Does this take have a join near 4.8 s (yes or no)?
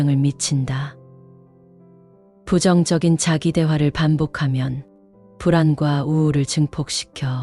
no